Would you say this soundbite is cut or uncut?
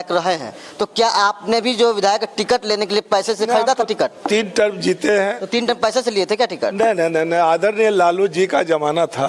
uncut